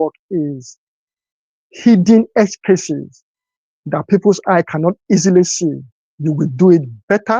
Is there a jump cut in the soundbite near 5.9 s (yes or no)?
yes